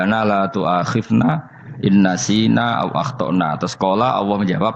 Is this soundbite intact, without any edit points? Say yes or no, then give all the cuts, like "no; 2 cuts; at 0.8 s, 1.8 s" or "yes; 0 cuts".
yes; 0 cuts